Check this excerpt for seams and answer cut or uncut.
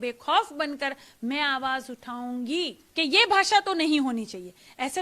cut